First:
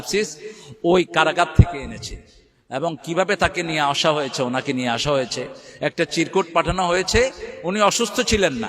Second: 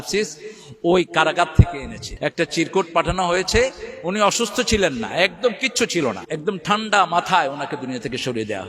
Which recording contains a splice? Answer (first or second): second